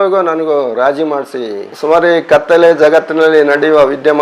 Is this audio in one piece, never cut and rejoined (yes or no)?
no